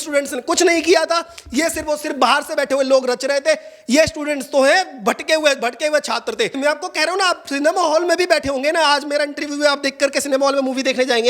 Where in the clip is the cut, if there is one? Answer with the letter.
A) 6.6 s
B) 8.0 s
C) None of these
A